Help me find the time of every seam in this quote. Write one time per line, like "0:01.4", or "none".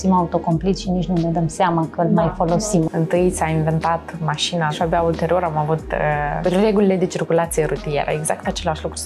0:02.9
0:04.7
0:06.4